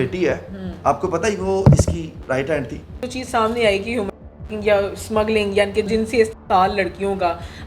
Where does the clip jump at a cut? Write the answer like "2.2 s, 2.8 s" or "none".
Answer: 3.0 s, 5.9 s